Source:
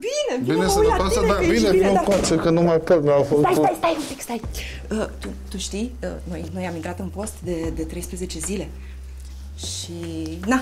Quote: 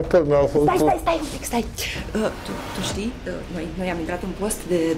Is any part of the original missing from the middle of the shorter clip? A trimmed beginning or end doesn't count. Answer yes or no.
no